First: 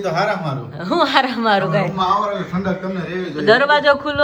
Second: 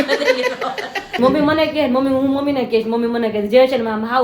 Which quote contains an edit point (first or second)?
second